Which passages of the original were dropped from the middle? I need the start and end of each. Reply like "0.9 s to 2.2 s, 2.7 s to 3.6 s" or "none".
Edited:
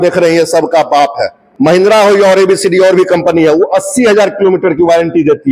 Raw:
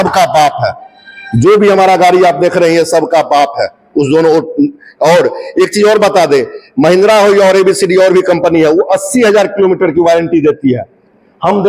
3.8 s to 6.6 s